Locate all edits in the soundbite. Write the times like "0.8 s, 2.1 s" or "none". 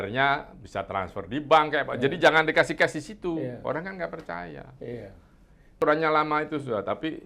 5.8 s